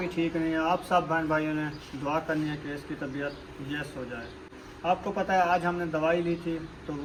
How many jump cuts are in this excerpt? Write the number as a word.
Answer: zero